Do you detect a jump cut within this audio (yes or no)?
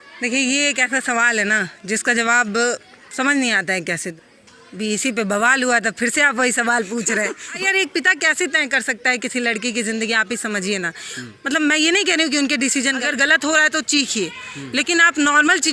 yes